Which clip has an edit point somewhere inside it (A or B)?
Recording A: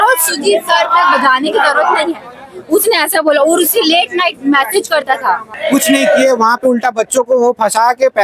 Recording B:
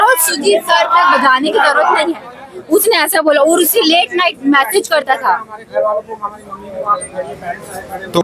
A